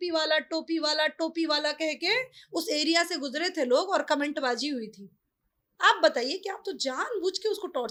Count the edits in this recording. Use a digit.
0